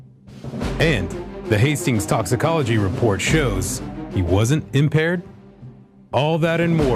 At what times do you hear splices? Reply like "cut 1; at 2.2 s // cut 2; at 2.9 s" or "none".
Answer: none